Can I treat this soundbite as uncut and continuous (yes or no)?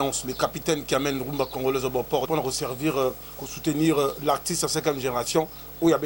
no